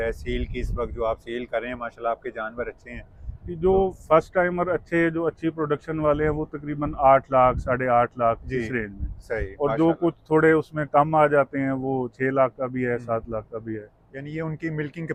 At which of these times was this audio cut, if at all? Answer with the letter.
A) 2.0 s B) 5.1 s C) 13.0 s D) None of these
D